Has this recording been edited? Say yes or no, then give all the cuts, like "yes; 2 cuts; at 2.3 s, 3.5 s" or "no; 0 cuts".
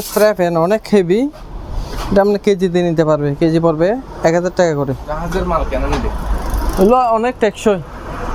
no; 0 cuts